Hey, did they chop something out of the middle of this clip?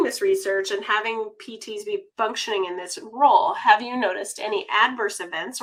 no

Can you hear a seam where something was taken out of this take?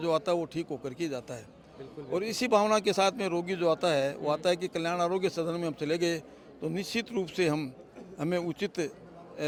no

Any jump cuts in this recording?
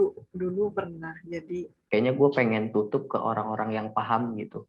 yes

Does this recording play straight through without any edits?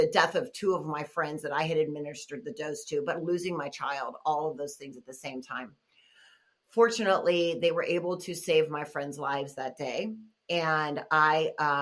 yes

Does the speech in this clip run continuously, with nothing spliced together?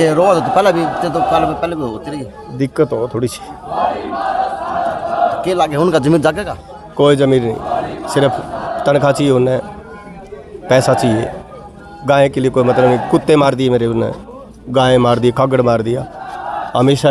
yes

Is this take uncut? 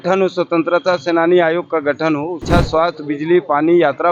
no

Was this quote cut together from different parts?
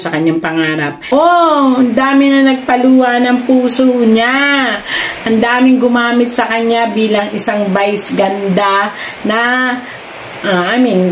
yes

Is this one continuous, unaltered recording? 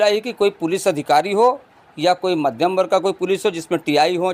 yes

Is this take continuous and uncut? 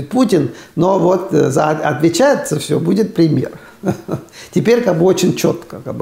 yes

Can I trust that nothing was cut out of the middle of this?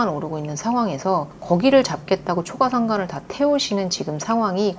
yes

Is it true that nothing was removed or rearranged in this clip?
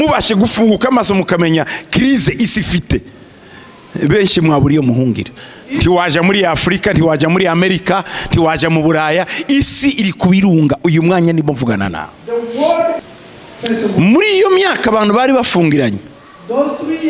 no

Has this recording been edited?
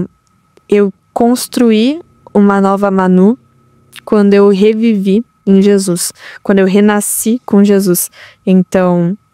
no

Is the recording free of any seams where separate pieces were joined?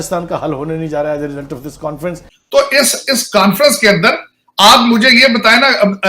no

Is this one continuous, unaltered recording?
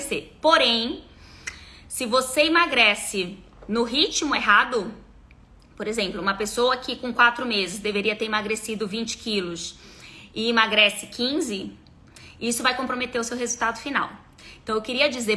yes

